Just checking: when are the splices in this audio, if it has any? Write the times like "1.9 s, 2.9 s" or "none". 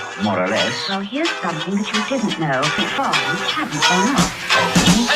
2.9 s

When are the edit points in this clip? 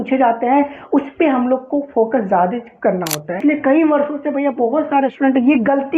3.4 s

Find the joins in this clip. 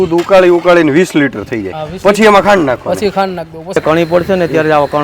3.8 s

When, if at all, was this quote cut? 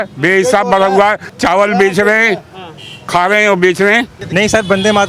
1.3 s, 4.2 s

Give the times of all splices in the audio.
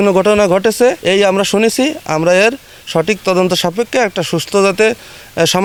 none

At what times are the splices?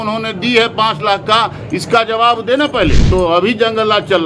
3.1 s

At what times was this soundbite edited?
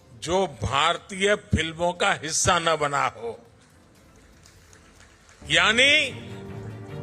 none

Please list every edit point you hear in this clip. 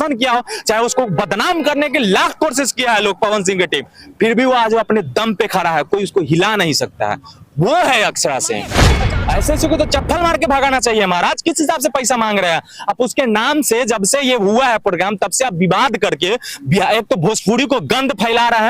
8.9 s

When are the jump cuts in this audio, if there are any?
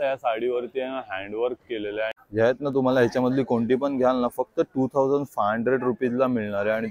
2.2 s

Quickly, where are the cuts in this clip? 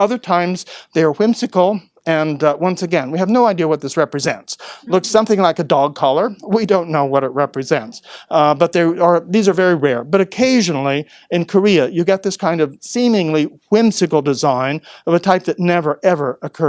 none

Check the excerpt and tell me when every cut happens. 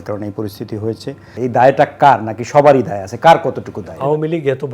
1.3 s, 3.9 s

